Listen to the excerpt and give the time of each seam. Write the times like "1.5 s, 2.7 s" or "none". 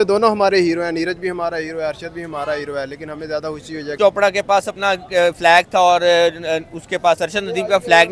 3.9 s